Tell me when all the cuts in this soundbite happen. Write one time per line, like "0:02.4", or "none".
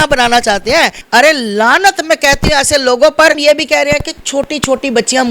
0:01.0
0:03.4

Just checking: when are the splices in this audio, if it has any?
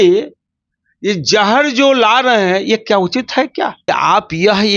0:03.8

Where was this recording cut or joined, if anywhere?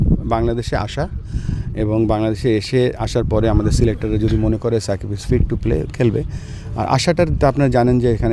none

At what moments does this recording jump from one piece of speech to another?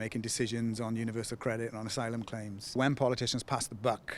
0:02.8

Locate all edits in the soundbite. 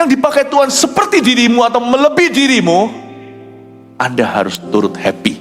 none

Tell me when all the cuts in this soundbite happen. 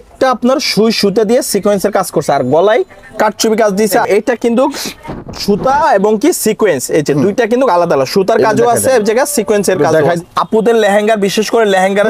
0:04.0
0:10.2

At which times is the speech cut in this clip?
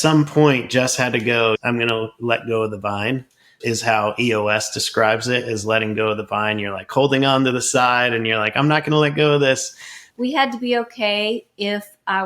0:01.6

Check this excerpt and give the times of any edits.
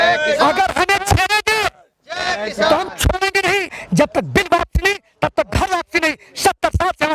0:03.8

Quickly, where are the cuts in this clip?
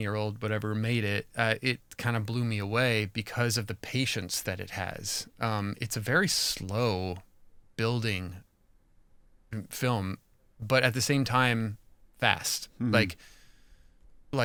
none

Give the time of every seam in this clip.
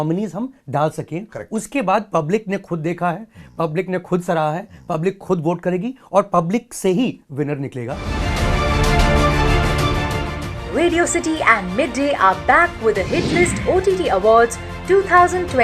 0:08.0

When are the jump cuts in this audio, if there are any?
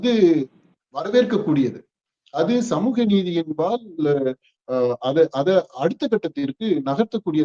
none

